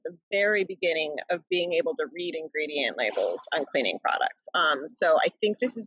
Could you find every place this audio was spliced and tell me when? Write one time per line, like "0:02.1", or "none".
none